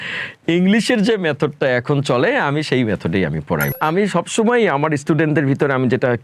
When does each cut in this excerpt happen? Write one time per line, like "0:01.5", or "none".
0:03.7